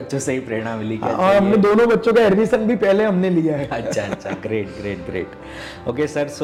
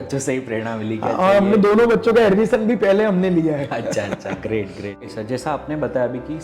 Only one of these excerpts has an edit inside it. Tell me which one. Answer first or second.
second